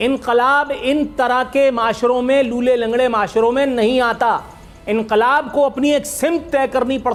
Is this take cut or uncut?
uncut